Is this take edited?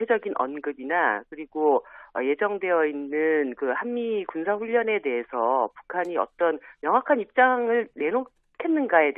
no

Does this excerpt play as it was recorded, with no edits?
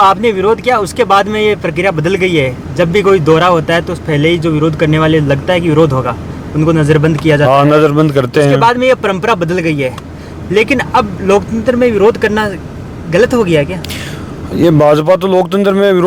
yes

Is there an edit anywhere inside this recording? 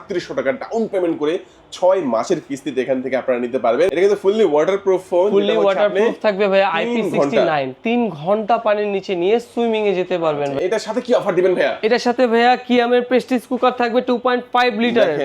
yes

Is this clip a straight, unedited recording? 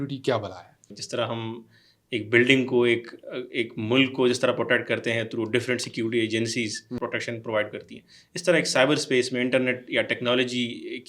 no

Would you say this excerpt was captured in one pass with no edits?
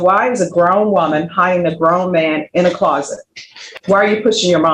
no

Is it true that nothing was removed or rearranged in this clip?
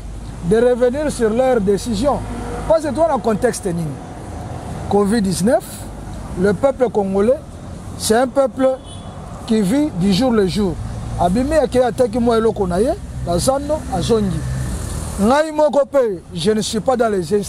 yes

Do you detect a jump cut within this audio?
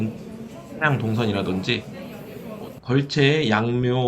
yes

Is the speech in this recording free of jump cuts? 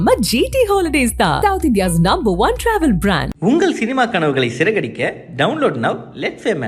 yes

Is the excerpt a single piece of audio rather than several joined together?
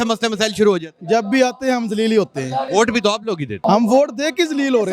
no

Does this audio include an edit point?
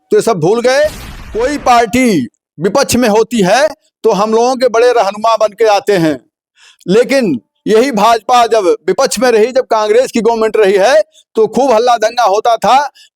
yes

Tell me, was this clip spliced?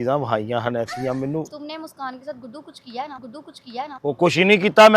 yes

